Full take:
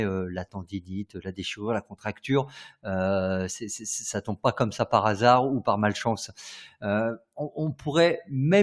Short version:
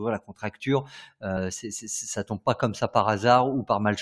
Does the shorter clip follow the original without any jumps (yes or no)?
no